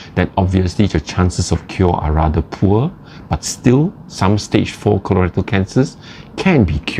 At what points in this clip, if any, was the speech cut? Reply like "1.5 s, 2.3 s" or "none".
none